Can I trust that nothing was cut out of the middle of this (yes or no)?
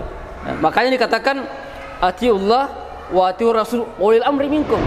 yes